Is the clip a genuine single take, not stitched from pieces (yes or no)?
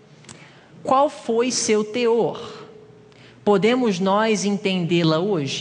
yes